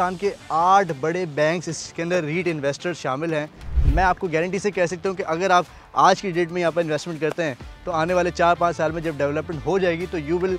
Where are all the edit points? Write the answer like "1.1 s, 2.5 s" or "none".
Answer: 3.8 s